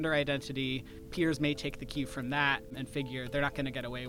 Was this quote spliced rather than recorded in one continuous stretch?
yes; 2 cuts; at 1.0 s, 2.7 s

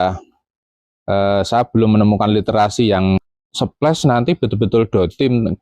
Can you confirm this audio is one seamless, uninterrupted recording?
no; 1 cut; at 3.4 s

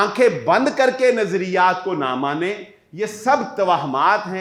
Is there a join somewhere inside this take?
no; 0 cuts

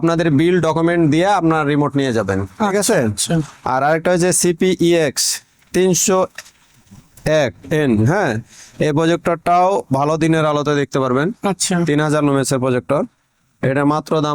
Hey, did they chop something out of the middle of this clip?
no; 0 cuts

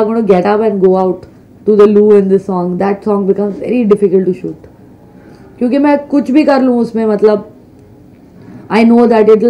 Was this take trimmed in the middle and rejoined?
no; 0 cuts

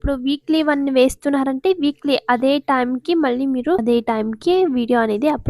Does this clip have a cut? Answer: yes; 1 cut; at 3.8 s

